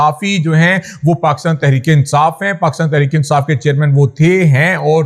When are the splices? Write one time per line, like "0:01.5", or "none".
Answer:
none